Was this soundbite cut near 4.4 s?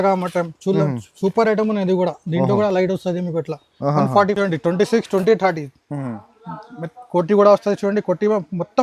yes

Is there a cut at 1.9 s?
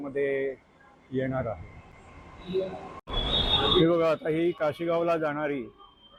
no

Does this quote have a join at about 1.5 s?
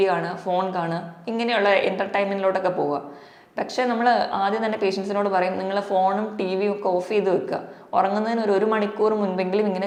no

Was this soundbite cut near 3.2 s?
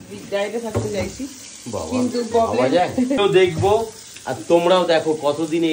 yes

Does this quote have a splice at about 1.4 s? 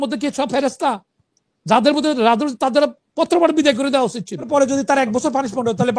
no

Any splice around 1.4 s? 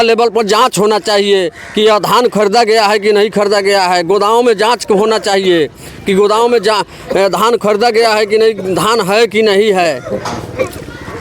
no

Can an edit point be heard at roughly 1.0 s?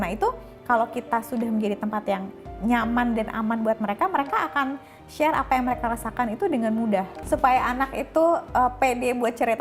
no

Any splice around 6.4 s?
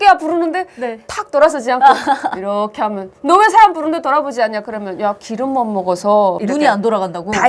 yes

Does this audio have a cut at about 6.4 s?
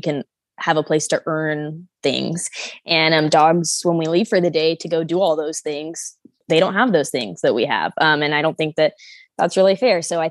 yes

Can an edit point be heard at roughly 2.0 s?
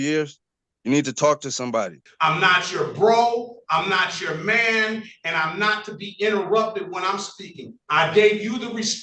yes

